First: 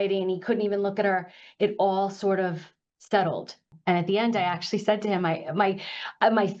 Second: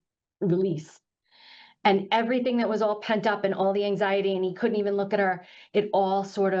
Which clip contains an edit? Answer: first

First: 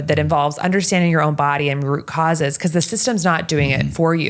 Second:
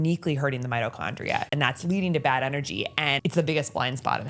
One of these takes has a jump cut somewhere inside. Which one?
second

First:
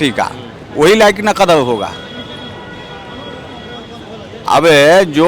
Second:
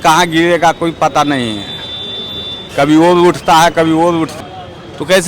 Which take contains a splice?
second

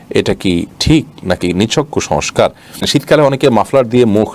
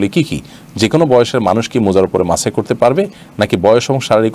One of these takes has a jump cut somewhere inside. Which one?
first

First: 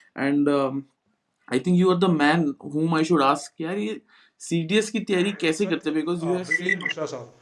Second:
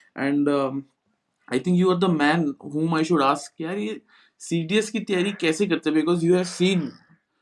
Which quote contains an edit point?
first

